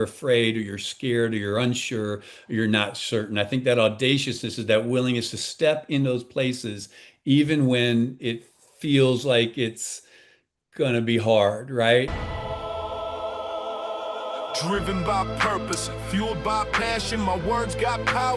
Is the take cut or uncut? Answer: cut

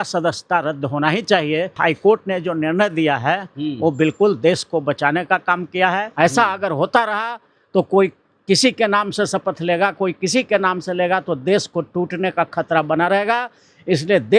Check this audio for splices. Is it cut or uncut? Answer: cut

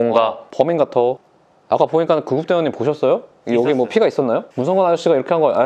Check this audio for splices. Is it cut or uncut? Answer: cut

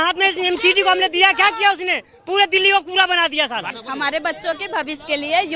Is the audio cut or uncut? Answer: cut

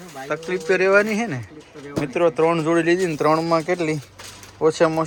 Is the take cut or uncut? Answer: uncut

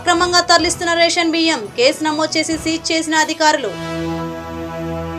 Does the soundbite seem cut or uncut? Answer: uncut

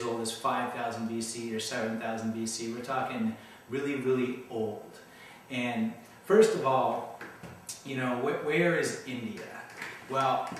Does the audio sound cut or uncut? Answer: cut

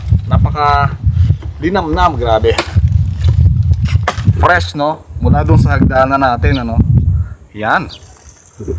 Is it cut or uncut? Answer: cut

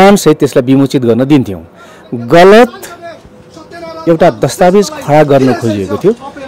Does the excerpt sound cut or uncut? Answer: uncut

